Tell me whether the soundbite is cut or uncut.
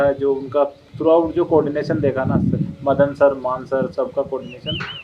uncut